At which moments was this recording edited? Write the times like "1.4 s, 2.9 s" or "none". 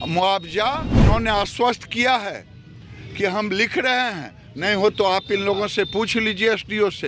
0.9 s